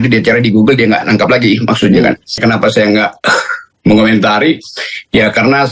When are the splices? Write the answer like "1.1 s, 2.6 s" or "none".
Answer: 2.4 s